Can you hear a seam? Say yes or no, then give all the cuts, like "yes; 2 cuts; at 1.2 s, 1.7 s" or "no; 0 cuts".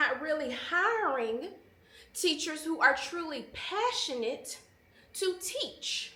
no; 0 cuts